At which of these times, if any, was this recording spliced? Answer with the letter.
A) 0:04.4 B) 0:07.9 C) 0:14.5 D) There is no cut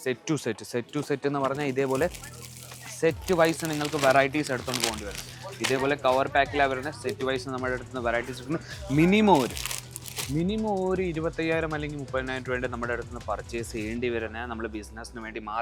D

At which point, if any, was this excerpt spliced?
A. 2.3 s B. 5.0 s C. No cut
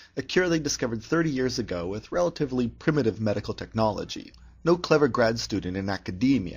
A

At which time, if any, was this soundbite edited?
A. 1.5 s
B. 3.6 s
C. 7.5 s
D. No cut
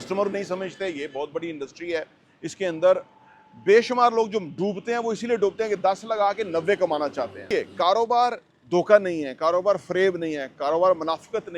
C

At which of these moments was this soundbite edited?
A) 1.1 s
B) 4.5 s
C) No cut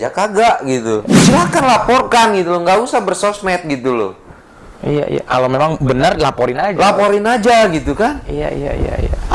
A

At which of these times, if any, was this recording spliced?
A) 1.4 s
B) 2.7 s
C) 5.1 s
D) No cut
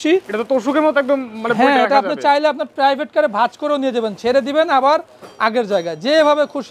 D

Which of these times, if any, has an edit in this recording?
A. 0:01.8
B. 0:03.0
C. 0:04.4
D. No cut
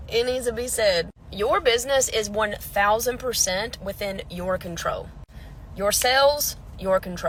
D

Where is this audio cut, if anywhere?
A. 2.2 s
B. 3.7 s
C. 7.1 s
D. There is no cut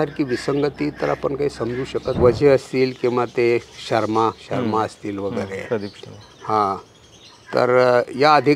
A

